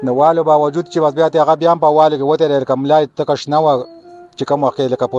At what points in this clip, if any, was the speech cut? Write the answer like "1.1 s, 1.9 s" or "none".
none